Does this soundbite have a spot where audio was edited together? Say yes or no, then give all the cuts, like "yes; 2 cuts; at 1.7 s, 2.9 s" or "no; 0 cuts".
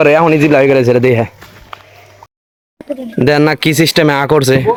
no; 0 cuts